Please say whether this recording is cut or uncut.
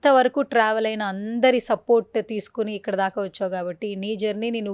uncut